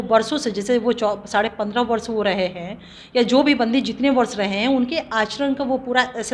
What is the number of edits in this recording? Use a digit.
0